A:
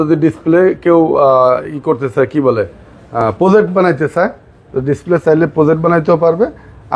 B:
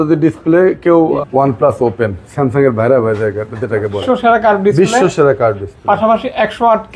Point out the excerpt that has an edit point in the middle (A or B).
B